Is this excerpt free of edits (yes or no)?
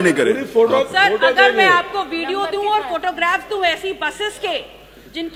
yes